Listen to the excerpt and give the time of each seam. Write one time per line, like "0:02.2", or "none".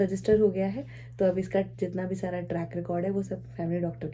none